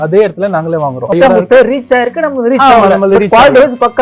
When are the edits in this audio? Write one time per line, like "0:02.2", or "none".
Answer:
0:01.1